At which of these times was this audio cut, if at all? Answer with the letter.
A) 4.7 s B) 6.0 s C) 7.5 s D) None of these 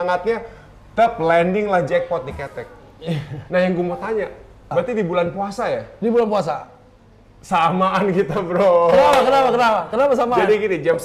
A